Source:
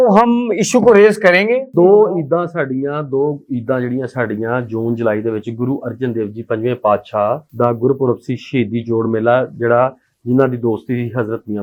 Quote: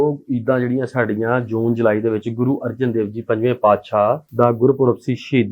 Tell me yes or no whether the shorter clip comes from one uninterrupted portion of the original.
yes